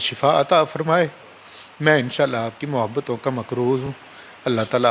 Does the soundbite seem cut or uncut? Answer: uncut